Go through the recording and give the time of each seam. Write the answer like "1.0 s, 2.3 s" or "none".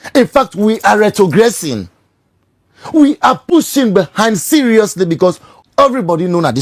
5.5 s